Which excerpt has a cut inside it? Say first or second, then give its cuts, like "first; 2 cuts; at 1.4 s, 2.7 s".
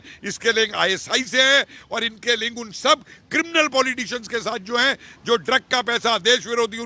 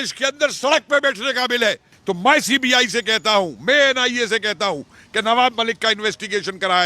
second; 1 cut; at 1.9 s